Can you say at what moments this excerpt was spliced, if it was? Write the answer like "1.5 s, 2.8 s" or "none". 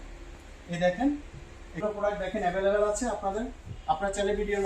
1.7 s